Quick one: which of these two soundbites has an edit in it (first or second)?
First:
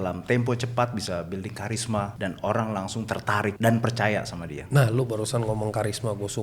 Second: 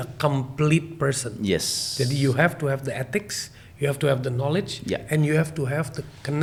first